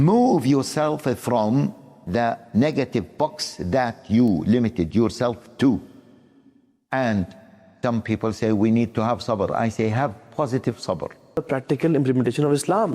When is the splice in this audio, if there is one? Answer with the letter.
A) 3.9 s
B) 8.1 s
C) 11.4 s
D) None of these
C